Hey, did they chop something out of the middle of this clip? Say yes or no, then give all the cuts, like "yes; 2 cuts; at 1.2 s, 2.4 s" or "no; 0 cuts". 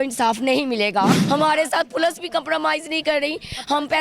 yes; 1 cut; at 1.1 s